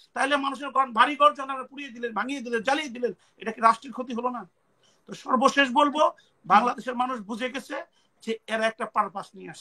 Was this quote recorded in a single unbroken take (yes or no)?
yes